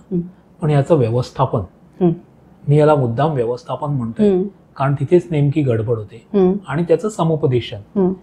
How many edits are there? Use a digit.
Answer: 0